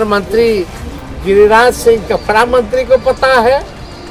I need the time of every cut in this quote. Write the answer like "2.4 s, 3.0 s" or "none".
none

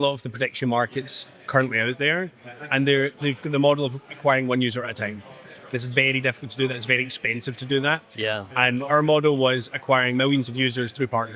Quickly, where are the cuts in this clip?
none

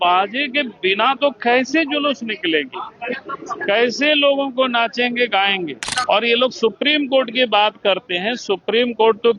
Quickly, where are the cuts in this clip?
5.9 s

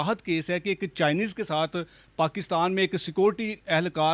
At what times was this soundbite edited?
none

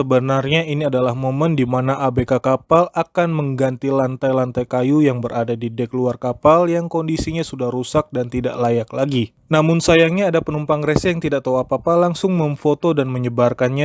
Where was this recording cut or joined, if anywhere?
none

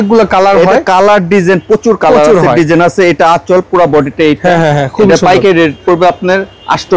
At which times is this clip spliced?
none

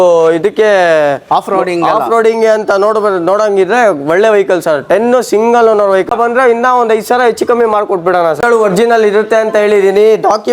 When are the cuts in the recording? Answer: 6.1 s, 8.4 s

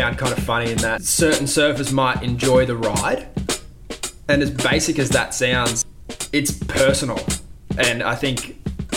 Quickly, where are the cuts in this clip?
1.1 s, 5.8 s

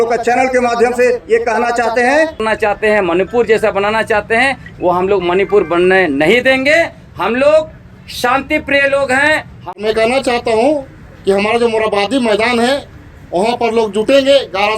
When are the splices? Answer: 2.4 s, 9.6 s

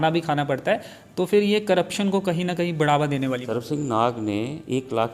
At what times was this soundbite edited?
3.6 s

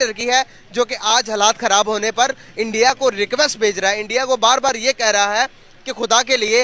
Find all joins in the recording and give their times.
none

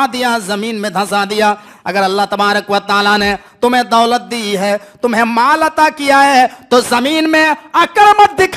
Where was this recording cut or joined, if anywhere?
none

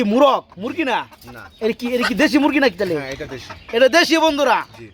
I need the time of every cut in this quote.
none

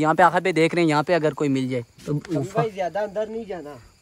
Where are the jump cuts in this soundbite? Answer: 2.0 s

